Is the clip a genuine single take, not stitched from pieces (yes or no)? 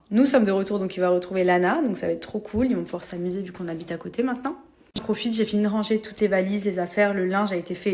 no